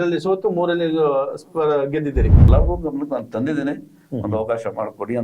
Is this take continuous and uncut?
no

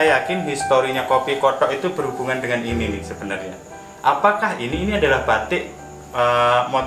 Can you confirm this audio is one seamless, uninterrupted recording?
yes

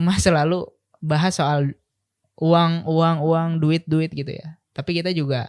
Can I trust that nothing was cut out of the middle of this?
yes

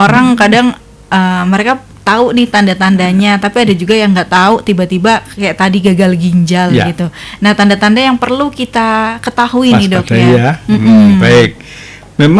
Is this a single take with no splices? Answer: yes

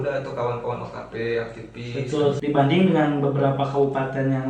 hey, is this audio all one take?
no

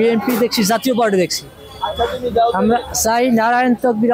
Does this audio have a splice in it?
no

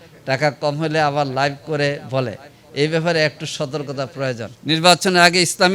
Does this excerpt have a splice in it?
yes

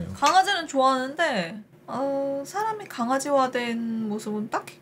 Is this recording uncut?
yes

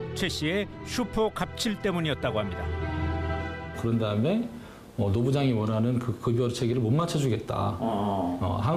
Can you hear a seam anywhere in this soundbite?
no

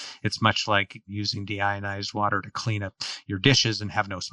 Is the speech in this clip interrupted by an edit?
yes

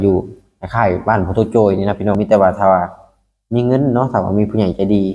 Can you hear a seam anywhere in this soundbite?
yes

